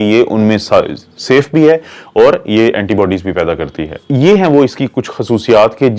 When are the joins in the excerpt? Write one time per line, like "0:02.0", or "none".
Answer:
0:04.0